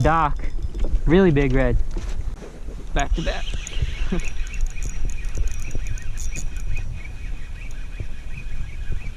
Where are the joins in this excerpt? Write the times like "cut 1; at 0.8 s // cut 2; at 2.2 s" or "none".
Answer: cut 1; at 2.2 s